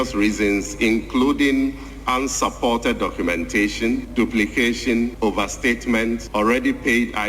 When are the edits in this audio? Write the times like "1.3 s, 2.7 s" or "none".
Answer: 4.1 s, 5.1 s, 6.2 s